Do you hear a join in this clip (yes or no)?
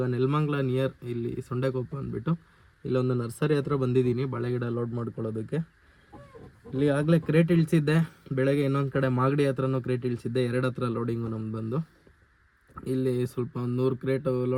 no